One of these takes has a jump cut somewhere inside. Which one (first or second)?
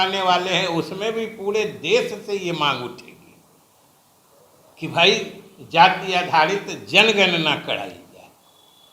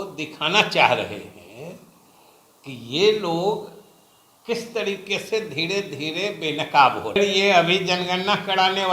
second